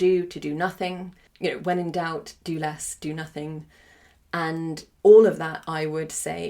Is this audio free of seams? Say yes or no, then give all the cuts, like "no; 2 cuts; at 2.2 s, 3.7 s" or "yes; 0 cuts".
no; 2 cuts; at 1.2 s, 4.9 s